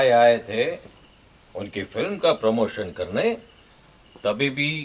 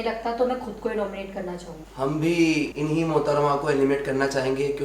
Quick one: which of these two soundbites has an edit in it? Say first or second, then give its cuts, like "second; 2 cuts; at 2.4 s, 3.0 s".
second; 2 cuts; at 1.8 s, 2.7 s